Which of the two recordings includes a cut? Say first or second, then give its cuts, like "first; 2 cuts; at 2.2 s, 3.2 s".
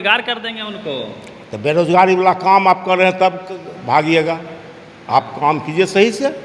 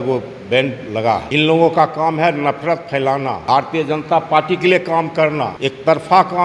second; 3 cuts; at 1.3 s, 3.4 s, 5.5 s